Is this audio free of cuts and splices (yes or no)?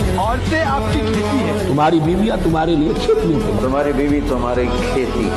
yes